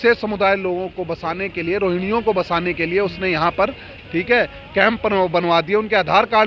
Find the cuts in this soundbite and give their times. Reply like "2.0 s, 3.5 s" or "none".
none